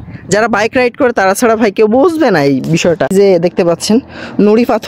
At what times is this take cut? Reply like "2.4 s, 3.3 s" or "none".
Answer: 3.1 s